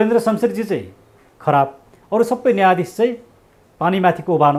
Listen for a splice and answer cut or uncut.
uncut